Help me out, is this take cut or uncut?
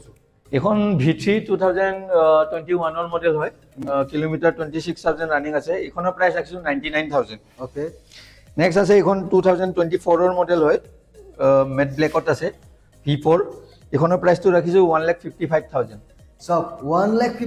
uncut